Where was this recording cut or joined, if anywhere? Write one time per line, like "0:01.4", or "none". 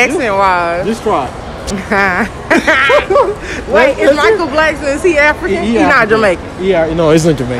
0:01.5